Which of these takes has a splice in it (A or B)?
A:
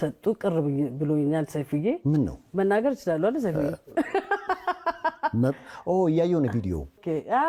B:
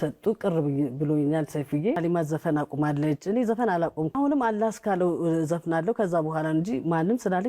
B